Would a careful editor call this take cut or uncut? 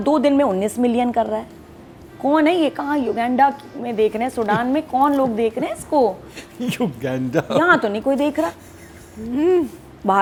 uncut